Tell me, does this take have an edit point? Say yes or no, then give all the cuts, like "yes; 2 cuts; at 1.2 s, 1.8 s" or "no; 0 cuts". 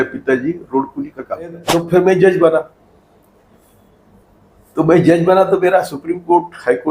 yes; 1 cut; at 1.6 s